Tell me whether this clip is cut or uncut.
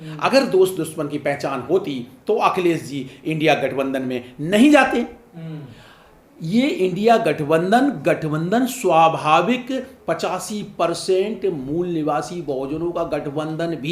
uncut